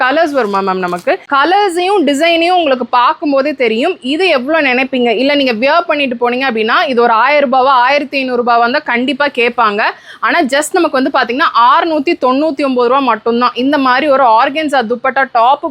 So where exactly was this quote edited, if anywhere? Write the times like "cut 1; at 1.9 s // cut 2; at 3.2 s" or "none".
cut 1; at 1.3 s